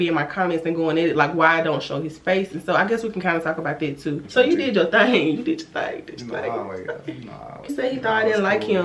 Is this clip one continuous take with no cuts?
no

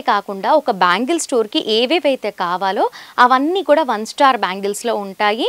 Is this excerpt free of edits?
yes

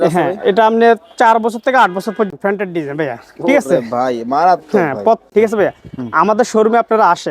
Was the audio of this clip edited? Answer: yes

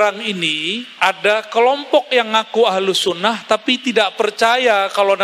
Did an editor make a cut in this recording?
no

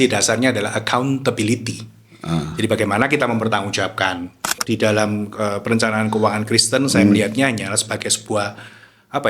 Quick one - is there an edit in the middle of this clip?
yes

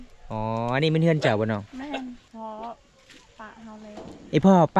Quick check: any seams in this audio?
yes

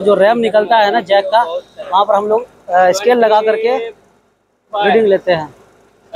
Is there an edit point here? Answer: no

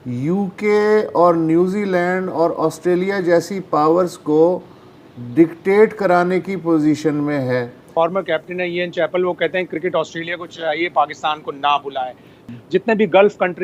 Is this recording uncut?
no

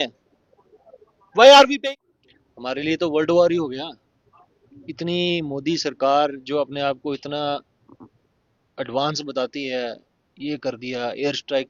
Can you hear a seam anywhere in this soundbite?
yes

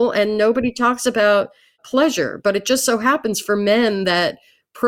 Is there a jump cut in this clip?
yes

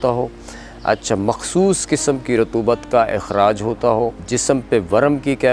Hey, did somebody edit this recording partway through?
yes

